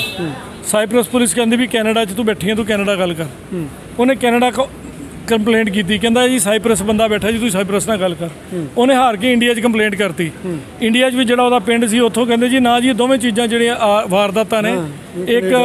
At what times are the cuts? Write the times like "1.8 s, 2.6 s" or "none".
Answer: none